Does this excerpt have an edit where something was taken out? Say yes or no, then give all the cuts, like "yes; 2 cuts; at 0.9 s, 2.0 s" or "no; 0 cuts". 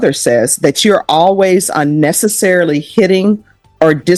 no; 0 cuts